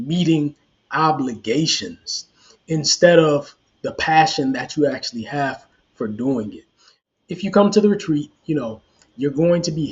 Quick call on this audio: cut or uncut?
cut